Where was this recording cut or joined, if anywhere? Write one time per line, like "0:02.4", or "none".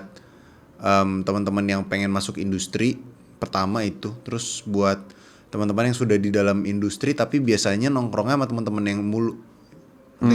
none